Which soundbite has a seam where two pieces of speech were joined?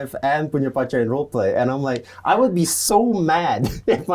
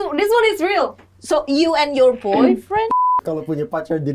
second; 1 cut; at 2.9 s

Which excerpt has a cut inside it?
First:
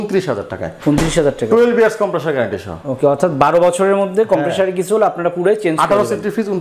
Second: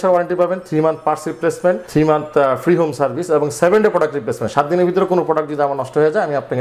second; 1 cut; at 1.8 s

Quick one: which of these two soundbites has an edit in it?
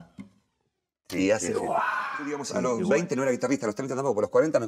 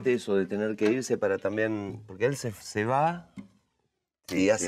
first; 1 cut; at 2.5 s

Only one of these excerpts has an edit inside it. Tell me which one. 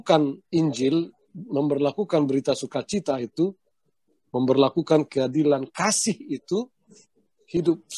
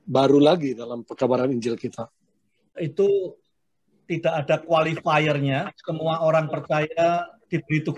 second; 1 cut; at 2.8 s

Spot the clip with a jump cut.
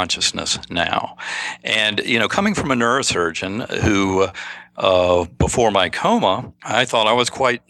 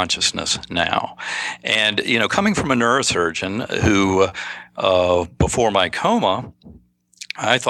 first; 1 cut; at 6.5 s

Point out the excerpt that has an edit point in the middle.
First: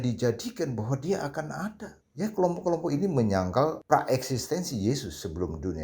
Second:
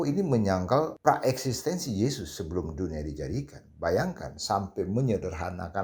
first; 1 cut; at 1.9 s

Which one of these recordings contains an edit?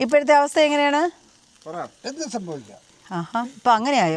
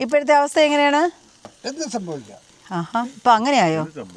second; 1 cut; at 1.5 s

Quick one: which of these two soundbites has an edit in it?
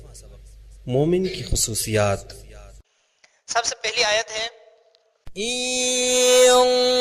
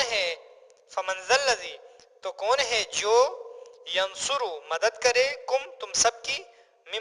second; 1 cut; at 2.7 s

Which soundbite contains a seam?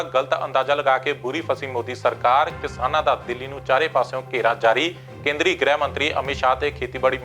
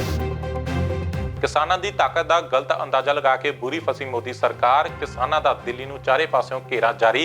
second; 1 cut; at 1.3 s

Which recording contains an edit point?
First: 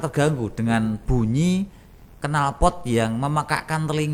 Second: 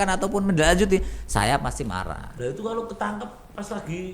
second; 1 cut; at 2.3 s

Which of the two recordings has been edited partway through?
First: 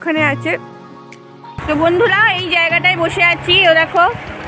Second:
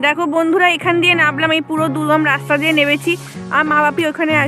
first; 1 cut; at 1.3 s

